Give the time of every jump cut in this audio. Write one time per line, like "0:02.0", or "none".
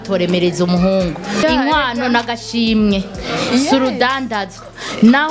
0:01.4